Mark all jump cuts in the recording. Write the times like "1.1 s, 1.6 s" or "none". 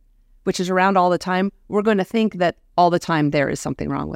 none

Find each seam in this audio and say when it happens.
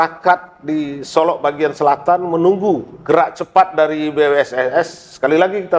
2.9 s

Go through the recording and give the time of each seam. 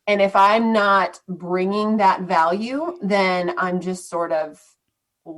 none

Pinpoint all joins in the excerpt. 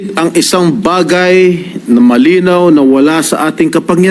none

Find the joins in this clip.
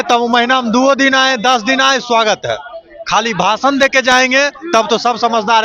none

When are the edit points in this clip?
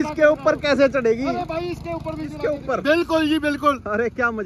2.4 s

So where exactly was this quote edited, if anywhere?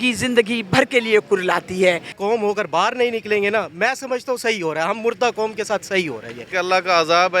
2.1 s, 6.4 s

